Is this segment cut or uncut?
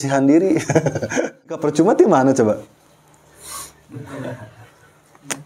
cut